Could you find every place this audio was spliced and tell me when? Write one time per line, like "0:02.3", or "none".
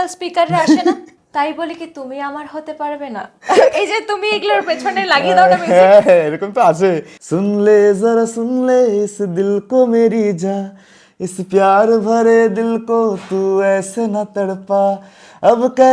0:01.1
0:07.1